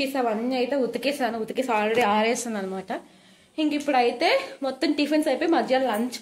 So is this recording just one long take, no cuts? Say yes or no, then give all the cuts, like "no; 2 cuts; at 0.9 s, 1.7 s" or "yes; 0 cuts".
yes; 0 cuts